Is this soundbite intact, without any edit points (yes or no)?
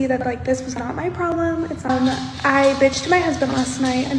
no